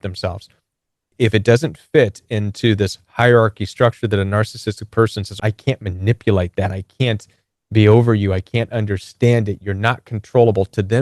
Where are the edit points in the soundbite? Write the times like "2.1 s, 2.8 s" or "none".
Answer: 1.1 s, 5.3 s